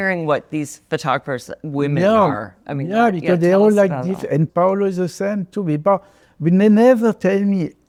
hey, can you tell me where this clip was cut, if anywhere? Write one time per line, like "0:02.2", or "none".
none